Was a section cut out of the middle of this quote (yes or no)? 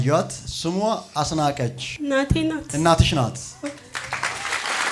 no